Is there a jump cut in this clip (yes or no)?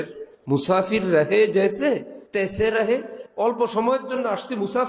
yes